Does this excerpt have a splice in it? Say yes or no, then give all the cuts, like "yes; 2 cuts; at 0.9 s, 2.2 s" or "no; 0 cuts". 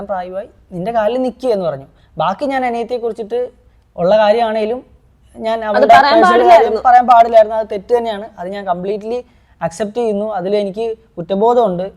no; 0 cuts